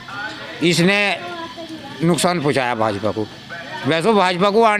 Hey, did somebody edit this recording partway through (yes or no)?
no